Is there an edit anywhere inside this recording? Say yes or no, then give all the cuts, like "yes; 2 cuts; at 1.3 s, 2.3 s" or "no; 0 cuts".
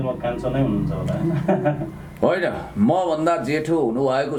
no; 0 cuts